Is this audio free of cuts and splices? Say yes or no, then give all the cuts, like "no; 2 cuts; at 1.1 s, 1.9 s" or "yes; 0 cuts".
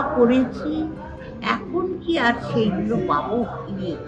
yes; 0 cuts